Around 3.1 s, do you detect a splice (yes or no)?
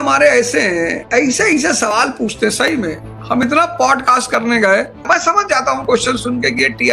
no